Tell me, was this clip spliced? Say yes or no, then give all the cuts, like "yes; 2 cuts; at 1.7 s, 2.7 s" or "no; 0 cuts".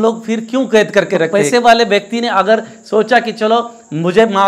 yes; 1 cut; at 1.3 s